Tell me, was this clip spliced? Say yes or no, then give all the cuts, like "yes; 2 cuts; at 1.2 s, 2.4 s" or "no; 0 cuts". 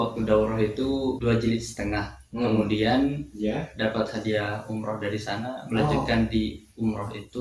yes; 1 cut; at 1.2 s